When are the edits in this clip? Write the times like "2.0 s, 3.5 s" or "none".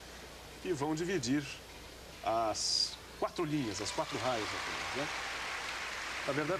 none

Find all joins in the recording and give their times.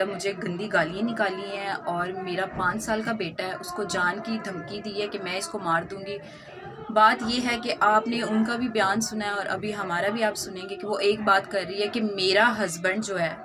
none

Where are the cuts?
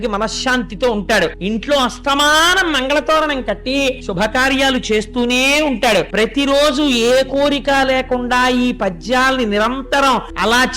1.4 s, 4.0 s, 6.1 s, 10.0 s

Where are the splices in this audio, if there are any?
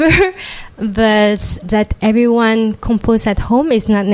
1.6 s

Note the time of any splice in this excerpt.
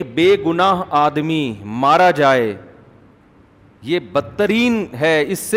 none

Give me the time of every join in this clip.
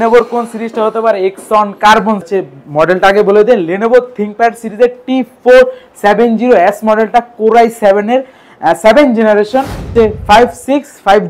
2.3 s, 9.9 s

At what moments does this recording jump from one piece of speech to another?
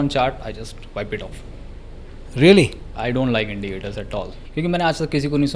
4.4 s

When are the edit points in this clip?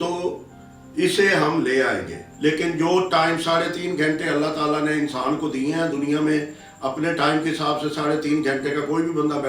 2.2 s

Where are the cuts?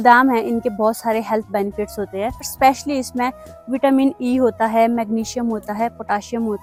none

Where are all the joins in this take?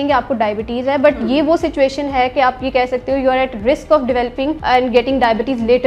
4.6 s

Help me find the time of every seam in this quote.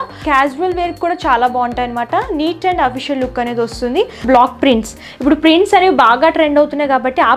4.2 s

